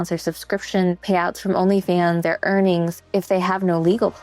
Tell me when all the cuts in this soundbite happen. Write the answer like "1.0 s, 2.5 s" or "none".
1.0 s, 2.2 s, 3.1 s